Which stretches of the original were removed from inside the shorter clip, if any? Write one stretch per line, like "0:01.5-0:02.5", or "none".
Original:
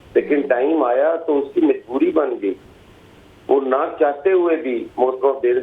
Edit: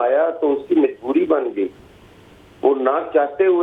none

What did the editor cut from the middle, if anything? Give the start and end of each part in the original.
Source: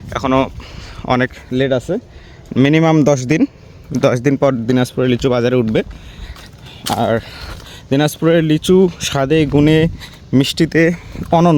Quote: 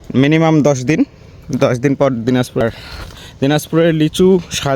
0:05.0-0:07.1

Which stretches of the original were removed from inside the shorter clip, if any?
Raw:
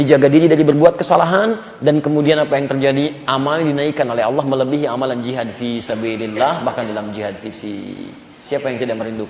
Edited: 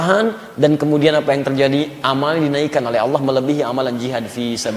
none

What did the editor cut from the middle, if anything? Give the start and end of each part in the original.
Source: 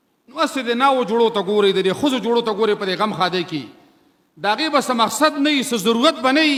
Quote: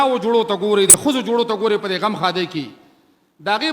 0:01.8-0:01.9

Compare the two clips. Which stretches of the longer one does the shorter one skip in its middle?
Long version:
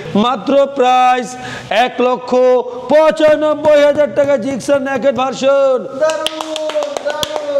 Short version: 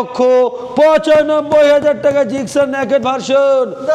none

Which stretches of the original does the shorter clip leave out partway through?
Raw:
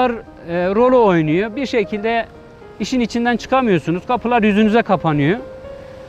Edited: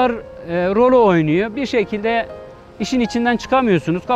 none

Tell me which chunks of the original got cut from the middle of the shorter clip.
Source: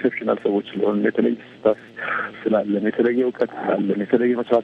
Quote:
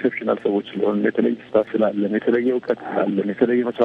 0:01.5-0:02.2

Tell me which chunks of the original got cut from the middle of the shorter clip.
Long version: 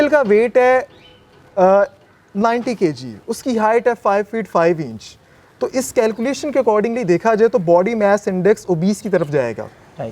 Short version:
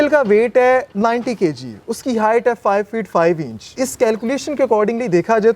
0:00.9-0:02.3
0:05.1-0:05.7

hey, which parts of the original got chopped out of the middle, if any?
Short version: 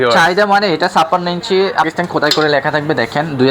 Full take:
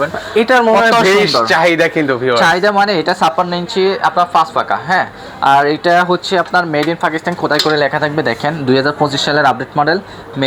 0:04.1-0:07.1

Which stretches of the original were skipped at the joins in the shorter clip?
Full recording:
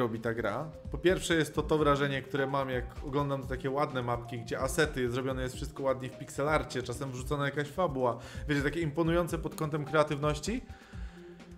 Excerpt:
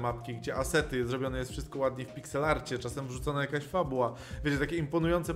none

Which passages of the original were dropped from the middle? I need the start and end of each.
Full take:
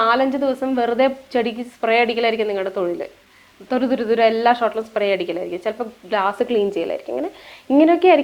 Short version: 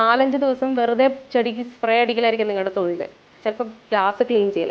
0:03.3-0:05.5

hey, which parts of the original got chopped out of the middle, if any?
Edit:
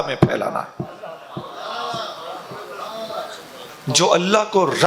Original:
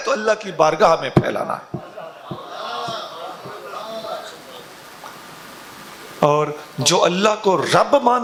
0:04.7-0:06.6

